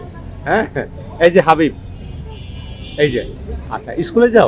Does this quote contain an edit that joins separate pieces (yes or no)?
yes